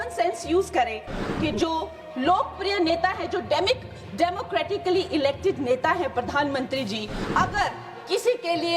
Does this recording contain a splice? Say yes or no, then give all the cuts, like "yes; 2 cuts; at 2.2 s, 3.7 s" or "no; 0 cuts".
yes; 1 cut; at 7.1 s